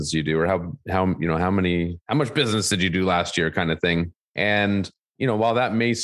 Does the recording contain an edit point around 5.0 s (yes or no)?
yes